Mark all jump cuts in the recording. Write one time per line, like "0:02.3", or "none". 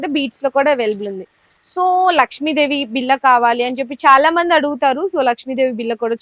none

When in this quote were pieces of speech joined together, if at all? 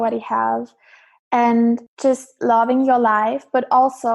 0:01.9

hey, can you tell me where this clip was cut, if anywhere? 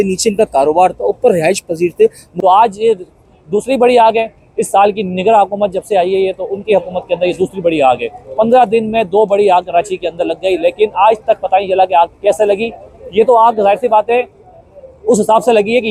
none

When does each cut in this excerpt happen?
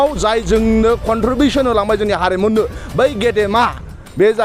none

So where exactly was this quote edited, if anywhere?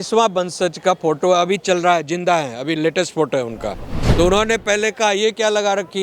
0:03.9

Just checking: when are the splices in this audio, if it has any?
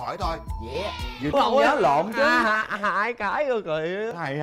0:01.3

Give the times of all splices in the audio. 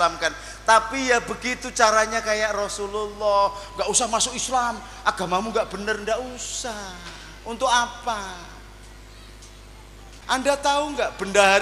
0:10.1

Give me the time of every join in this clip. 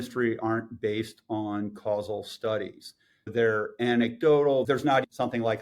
0:03.3
0:04.8

